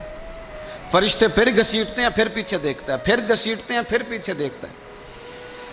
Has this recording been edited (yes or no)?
no